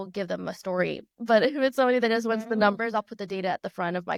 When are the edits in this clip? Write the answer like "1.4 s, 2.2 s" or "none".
none